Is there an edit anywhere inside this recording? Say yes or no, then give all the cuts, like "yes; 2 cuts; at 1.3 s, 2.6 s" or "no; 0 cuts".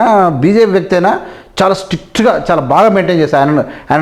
no; 0 cuts